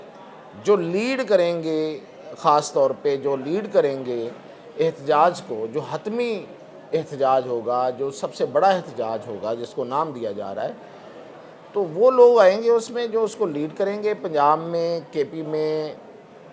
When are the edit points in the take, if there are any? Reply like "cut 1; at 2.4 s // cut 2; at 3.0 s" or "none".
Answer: none